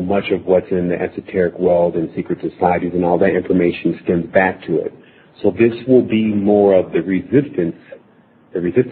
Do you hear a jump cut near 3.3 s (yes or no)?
no